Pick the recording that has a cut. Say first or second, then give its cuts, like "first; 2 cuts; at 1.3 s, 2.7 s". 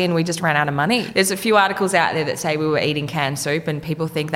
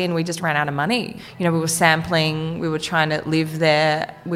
first; 1 cut; at 1.1 s